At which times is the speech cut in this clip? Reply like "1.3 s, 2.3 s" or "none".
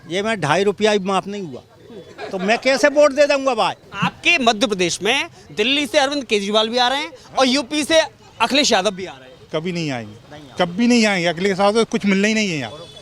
3.9 s